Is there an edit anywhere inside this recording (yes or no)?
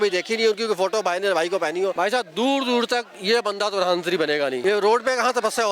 yes